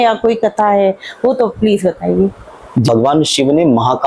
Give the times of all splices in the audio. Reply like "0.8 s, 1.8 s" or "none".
2.9 s